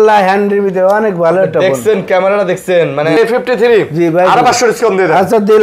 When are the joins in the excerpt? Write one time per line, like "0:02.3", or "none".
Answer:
0:03.2